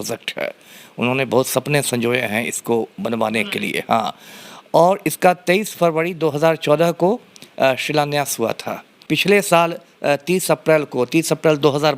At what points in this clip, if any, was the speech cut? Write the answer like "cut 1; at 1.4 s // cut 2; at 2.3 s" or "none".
cut 1; at 8.9 s